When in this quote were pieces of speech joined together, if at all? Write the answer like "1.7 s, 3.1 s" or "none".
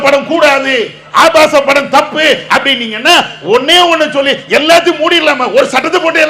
none